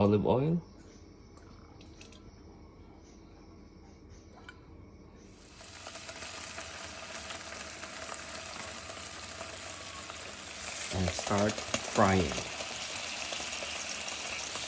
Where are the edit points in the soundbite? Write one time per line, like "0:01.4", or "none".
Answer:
0:05.6